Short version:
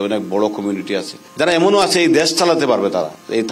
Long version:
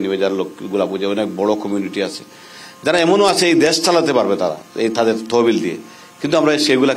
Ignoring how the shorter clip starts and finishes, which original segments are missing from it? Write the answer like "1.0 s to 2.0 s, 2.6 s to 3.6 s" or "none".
2.3 s to 2.7 s